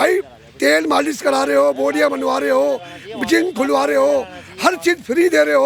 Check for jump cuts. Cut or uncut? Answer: uncut